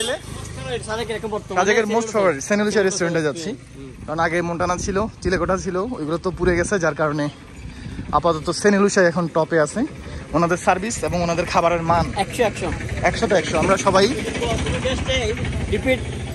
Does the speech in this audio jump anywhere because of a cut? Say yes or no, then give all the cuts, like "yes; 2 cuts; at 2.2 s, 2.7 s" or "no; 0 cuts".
no; 0 cuts